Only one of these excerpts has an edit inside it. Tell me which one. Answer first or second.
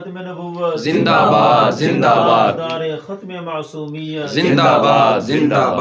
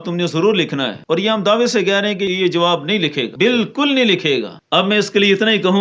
second